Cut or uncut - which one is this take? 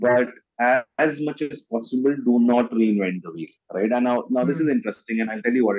uncut